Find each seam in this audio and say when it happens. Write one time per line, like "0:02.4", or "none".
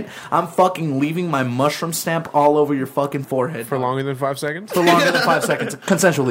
none